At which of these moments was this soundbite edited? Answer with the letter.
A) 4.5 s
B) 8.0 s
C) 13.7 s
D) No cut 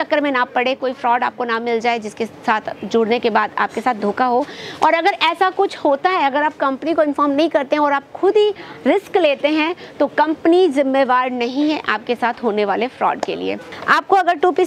C